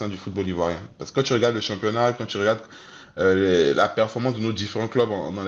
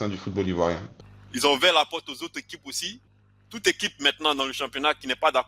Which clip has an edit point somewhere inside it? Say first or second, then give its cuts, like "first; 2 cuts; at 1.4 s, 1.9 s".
second; 1 cut; at 0.9 s